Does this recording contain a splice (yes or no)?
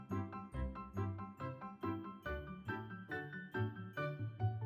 no